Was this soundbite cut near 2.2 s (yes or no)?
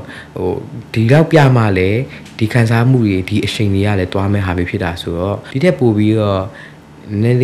no